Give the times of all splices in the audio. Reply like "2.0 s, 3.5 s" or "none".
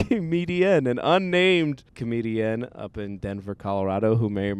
2.0 s